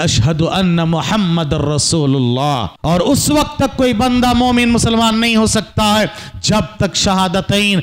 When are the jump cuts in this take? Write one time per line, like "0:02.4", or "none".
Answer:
0:02.7